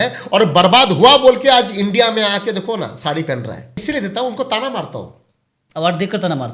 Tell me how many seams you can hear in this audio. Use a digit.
1